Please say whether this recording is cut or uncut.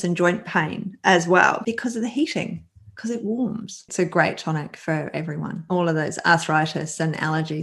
cut